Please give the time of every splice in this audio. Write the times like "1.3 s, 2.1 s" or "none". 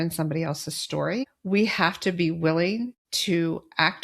1.3 s, 3.1 s